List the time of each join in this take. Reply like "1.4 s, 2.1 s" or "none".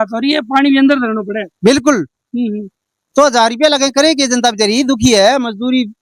none